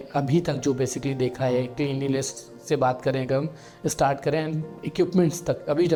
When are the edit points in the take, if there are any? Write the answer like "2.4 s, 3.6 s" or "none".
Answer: none